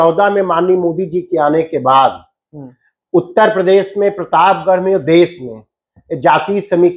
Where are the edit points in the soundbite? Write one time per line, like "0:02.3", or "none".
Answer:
none